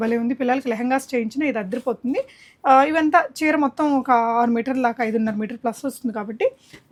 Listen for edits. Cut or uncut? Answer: uncut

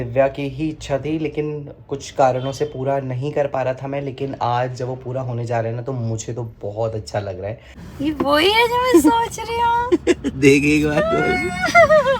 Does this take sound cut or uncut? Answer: cut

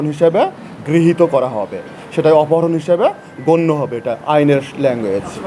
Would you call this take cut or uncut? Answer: uncut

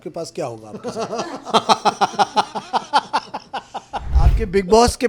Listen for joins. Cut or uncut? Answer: cut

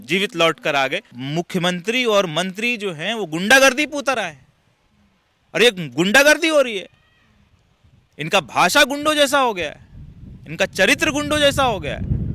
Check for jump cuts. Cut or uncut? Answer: cut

